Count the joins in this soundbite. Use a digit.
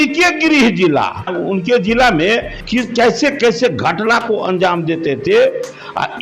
2